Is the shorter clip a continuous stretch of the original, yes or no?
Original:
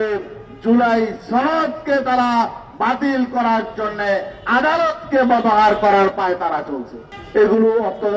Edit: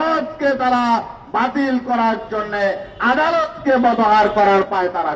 yes